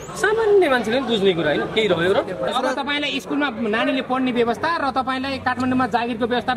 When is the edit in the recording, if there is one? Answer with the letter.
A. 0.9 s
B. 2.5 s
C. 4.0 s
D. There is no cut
B